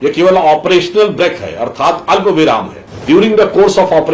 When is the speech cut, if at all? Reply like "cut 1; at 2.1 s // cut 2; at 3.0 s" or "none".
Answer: cut 1; at 3.0 s